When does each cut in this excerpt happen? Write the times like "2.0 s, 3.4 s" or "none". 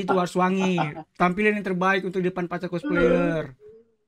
none